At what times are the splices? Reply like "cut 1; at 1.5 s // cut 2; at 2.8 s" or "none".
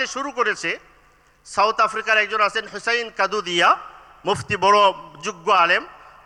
none